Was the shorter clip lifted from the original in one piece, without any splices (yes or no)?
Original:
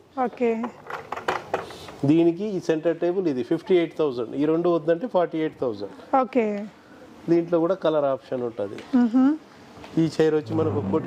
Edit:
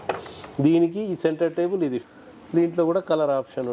no